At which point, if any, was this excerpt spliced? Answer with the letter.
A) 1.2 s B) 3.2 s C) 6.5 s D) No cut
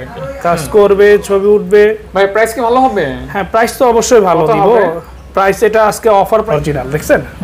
C